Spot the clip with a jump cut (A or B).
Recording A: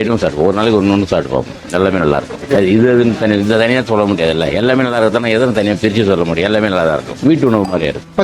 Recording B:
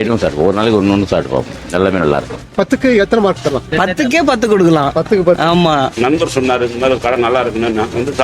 B